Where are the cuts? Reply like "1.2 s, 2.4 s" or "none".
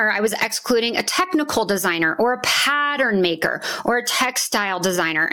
none